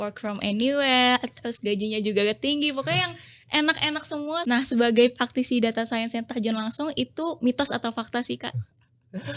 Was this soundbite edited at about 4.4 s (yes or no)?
yes